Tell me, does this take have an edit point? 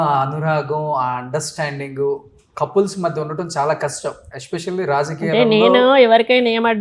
no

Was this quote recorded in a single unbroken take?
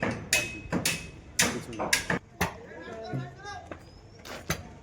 no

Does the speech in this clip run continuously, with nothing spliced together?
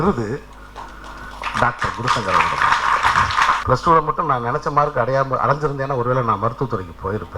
no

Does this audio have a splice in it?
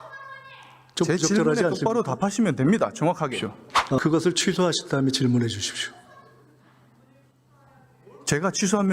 yes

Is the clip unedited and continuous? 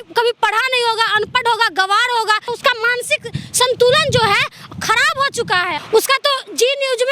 no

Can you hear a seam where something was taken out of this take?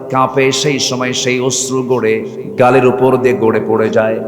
yes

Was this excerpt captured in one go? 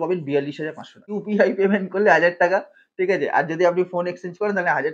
no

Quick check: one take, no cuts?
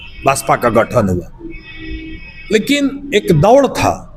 yes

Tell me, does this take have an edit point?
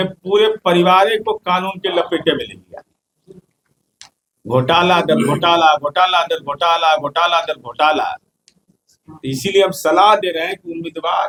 no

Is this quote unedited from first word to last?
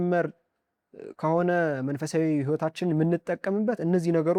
yes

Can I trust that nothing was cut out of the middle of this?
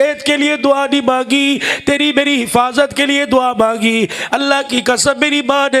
yes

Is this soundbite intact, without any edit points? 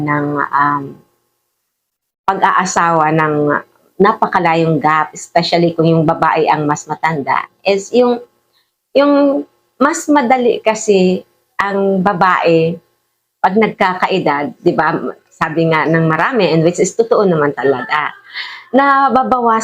yes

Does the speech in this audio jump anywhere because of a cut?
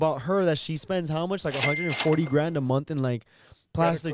no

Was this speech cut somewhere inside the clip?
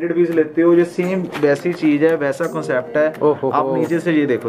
no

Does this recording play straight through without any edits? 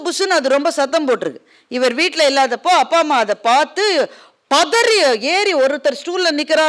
yes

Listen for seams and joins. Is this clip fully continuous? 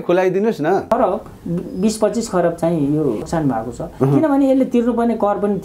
yes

